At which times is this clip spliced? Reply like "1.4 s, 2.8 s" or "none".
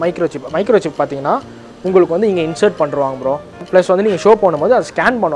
3.6 s